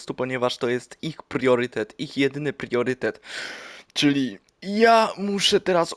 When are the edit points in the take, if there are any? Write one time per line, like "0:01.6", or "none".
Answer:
none